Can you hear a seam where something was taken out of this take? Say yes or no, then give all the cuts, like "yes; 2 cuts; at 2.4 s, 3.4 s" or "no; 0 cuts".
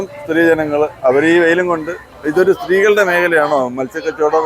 yes; 1 cut; at 2.0 s